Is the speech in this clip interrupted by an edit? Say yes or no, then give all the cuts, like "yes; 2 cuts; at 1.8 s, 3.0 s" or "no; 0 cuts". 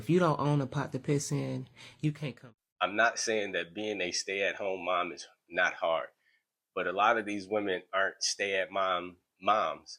yes; 1 cut; at 2.3 s